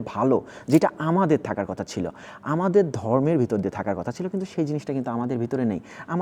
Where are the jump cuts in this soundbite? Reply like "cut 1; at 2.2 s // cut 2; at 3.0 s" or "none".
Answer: none